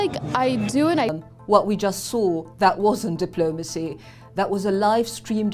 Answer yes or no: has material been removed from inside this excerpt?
yes